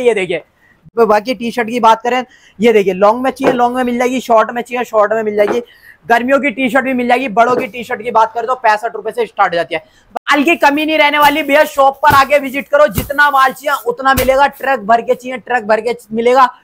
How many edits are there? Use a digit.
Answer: 2